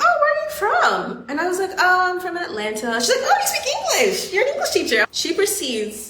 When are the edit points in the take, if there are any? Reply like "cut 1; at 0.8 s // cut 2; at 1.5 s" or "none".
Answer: cut 1; at 5.0 s